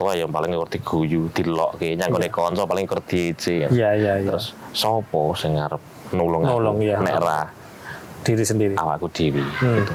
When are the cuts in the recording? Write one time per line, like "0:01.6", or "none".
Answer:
none